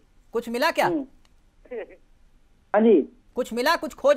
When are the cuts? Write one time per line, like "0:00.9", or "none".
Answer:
0:02.7